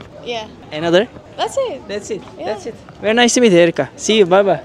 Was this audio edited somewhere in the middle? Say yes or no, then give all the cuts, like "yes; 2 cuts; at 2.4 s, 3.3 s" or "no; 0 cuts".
no; 0 cuts